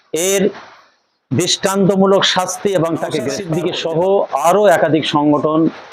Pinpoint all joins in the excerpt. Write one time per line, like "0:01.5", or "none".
0:03.4